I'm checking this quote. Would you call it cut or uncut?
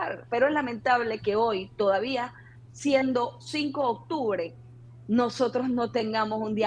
uncut